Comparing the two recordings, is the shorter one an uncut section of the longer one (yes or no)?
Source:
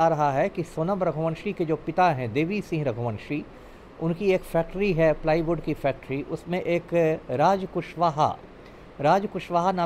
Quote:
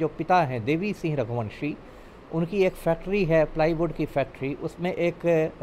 yes